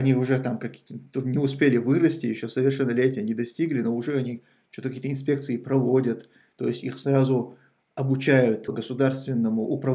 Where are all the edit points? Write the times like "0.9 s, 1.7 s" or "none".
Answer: 8.7 s